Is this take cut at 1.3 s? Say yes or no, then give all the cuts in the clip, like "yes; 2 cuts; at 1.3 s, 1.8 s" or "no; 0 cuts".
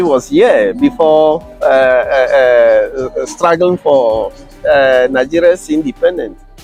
no; 0 cuts